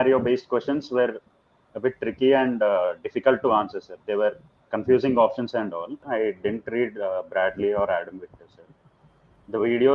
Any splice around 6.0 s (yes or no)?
yes